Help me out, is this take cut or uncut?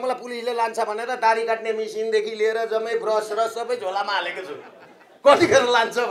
uncut